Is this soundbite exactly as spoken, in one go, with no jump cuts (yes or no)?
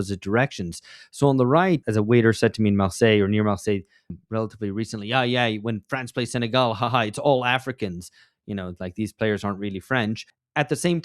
no